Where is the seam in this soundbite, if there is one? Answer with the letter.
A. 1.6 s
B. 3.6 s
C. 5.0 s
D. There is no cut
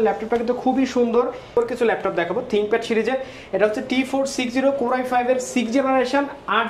A